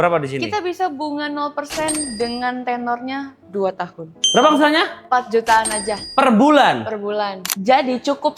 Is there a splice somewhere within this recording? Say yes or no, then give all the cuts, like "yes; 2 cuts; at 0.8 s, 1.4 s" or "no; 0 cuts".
yes; 2 cuts; at 4.2 s, 7.5 s